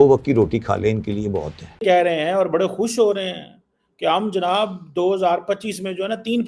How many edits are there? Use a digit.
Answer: 1